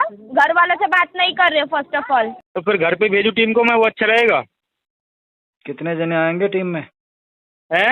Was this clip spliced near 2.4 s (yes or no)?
yes